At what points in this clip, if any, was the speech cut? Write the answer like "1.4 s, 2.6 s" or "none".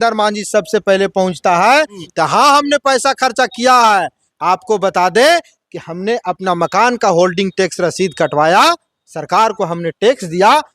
2.0 s